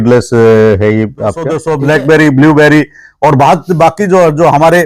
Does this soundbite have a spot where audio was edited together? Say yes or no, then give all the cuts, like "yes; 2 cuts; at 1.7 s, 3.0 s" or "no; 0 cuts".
yes; 1 cut; at 1.6 s